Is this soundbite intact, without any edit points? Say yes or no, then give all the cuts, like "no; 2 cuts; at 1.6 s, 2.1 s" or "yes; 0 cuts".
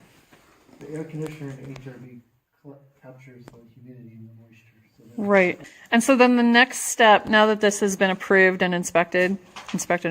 no; 1 cut; at 5.7 s